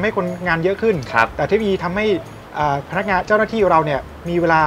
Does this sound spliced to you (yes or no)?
no